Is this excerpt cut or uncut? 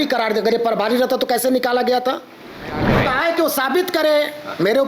cut